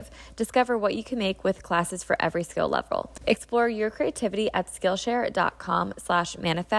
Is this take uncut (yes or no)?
no